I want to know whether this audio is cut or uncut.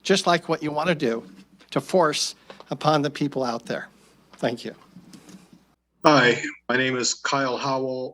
uncut